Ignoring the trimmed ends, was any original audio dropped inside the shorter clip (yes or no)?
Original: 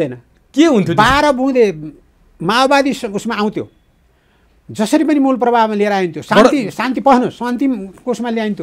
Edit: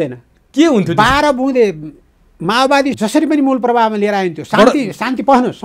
yes